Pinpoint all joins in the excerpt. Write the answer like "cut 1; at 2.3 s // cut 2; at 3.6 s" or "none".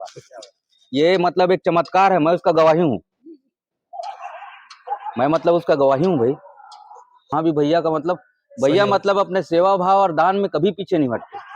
cut 1; at 7.3 s